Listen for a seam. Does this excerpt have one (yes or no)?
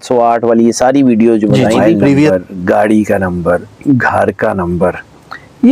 yes